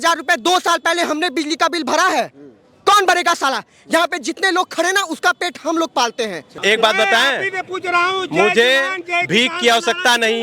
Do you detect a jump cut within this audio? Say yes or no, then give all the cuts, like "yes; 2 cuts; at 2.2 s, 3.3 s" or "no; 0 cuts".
yes; 1 cut; at 6.5 s